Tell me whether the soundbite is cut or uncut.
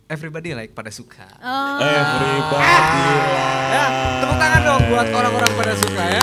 uncut